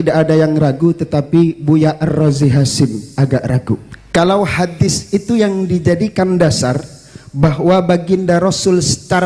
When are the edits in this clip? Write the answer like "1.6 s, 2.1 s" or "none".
3.9 s